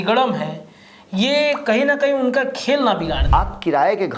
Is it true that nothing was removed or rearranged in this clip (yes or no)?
no